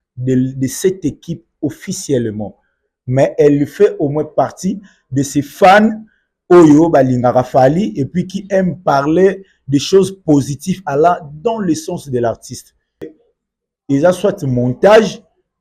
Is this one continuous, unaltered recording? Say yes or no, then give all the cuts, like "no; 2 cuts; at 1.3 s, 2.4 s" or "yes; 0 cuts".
no; 1 cut; at 13.1 s